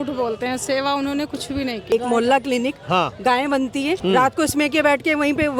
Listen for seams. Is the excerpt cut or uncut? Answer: cut